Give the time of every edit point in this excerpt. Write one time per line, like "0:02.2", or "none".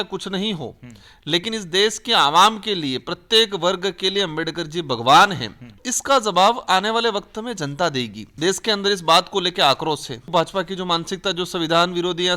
0:05.8
0:08.2
0:10.3